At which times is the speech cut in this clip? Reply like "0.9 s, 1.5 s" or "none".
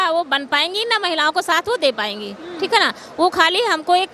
none